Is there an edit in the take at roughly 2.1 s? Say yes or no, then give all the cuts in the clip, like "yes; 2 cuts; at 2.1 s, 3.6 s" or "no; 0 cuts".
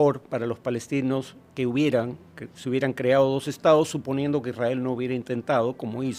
no; 0 cuts